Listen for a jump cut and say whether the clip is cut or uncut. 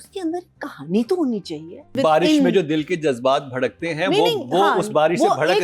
cut